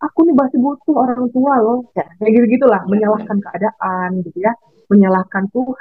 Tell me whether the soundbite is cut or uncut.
uncut